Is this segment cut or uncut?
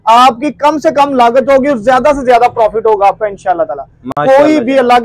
uncut